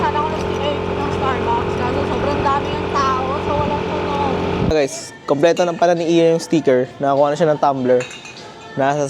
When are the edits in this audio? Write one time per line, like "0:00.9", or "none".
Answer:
0:04.7